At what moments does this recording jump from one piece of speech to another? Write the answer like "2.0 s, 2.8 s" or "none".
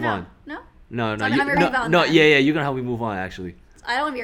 none